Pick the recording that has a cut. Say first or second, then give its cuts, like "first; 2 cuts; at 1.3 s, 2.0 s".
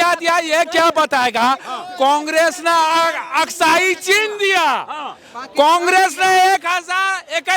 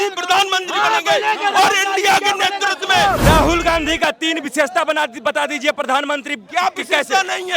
second; 1 cut; at 3.2 s